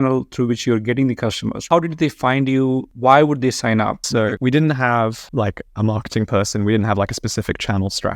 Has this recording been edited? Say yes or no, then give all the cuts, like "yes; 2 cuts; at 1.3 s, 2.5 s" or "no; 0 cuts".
yes; 3 cuts; at 1.7 s, 2.9 s, 4.3 s